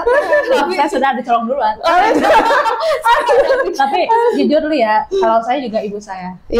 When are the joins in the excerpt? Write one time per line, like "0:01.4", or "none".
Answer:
none

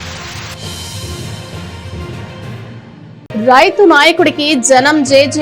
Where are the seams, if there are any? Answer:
0:02.7

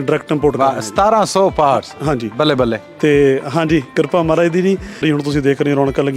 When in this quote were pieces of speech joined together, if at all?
0:05.0

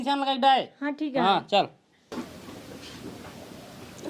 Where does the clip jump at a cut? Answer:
0:02.0

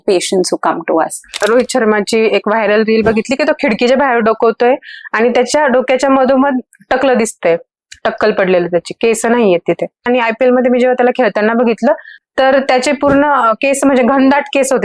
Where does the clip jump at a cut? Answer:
0:01.3
0:10.1

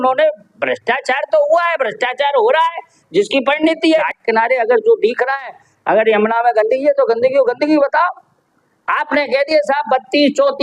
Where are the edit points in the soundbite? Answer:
0:03.8

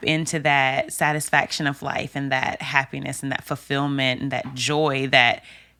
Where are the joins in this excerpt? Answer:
none

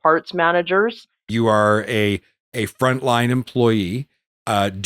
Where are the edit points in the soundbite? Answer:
0:01.3

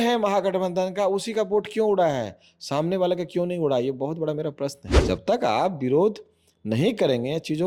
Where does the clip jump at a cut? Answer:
0:04.9

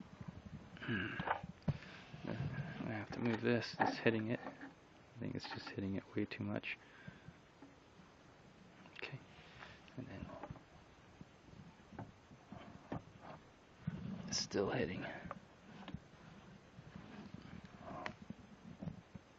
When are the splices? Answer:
none

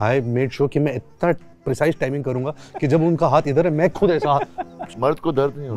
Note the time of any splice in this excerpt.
0:04.8

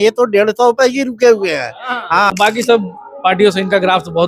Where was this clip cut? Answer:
0:02.3

